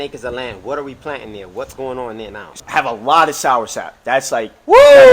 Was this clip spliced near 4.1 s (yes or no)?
no